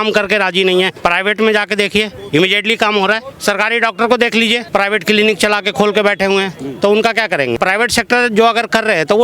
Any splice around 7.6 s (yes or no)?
yes